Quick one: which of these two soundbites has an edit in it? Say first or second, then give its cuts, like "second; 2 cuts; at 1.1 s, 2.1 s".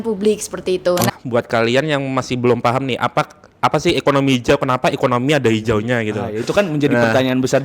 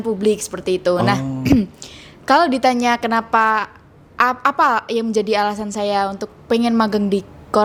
first; 1 cut; at 1.1 s